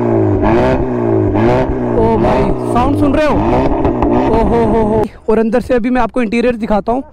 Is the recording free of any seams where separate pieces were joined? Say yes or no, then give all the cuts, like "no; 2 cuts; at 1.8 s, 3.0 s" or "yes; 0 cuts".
no; 1 cut; at 5.1 s